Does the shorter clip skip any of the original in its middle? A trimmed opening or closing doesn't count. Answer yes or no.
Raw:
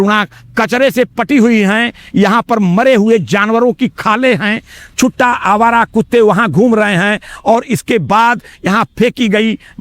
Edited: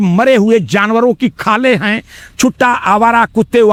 no